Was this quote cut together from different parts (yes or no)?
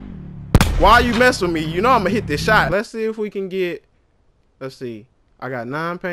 yes